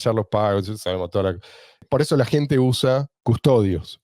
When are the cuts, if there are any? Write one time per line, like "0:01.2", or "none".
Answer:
0:01.8
0:03.1